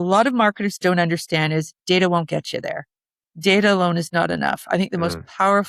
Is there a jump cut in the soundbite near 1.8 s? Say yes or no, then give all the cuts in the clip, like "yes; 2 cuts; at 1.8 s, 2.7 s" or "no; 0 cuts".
no; 0 cuts